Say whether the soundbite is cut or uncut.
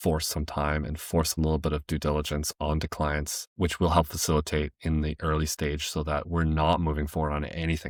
uncut